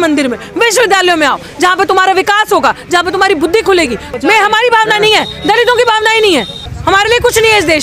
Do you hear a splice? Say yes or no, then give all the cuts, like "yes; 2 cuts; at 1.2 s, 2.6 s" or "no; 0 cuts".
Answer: yes; 2 cuts; at 4.1 s, 6.7 s